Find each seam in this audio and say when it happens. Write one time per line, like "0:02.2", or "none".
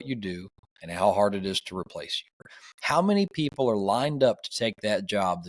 0:02.4